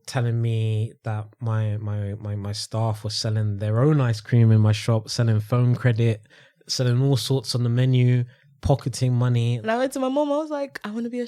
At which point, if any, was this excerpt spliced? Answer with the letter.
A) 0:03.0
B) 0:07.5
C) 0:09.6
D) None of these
C